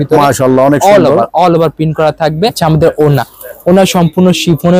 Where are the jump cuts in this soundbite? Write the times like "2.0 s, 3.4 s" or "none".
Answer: 2.6 s